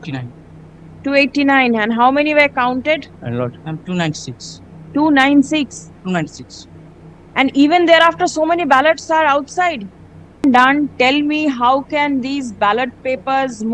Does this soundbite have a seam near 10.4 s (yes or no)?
yes